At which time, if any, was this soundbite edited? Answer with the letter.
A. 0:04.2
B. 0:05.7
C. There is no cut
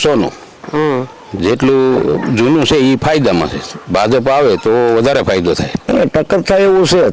B